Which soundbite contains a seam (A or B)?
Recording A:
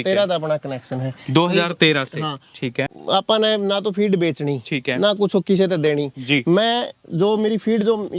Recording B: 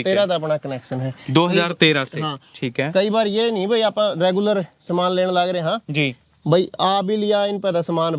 A